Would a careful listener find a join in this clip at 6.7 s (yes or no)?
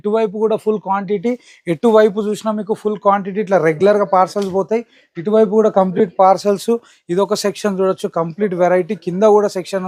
no